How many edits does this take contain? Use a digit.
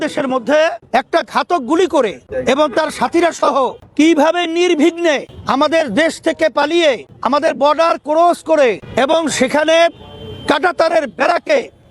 6